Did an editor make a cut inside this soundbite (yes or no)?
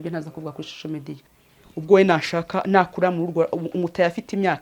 yes